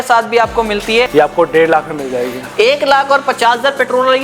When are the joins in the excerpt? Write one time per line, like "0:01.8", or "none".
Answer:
0:01.1